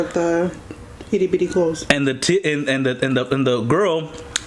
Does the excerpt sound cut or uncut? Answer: uncut